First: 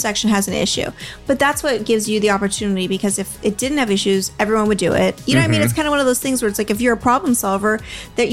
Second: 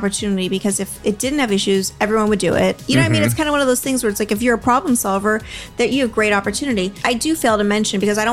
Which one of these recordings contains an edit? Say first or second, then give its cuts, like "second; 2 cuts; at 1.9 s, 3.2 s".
second; 1 cut; at 7.0 s